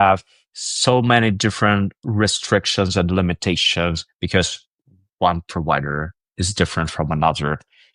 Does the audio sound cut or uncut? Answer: uncut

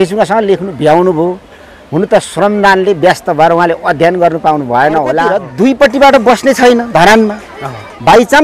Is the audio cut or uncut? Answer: cut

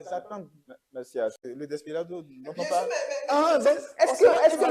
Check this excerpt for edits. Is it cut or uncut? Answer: cut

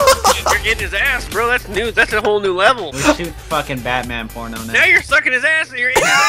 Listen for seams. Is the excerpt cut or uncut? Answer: uncut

